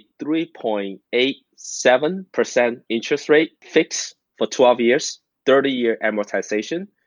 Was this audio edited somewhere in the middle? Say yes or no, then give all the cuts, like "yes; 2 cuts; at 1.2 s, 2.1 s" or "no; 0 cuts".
yes; 3 cuts; at 1.0 s, 2.2 s, 3.6 s